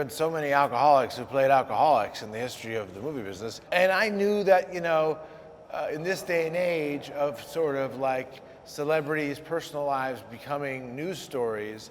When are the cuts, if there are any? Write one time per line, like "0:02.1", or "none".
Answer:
0:03.6